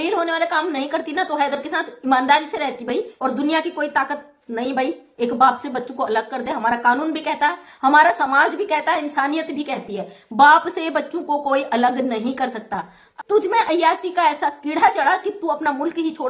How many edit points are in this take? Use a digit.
2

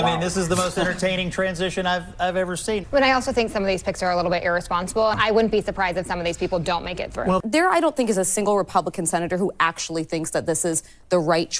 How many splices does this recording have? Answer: 3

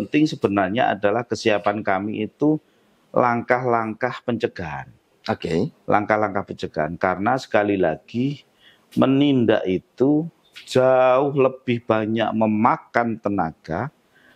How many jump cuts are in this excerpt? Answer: 0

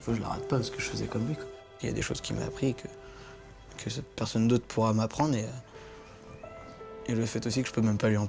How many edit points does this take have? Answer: 1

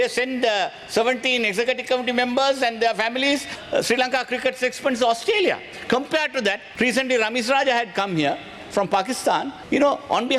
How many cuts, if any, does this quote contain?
3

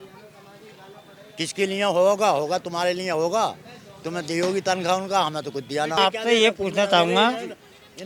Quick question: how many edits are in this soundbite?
1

